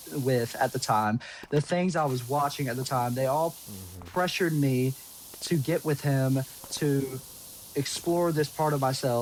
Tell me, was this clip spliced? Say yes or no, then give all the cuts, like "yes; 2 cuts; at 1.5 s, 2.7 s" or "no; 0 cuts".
no; 0 cuts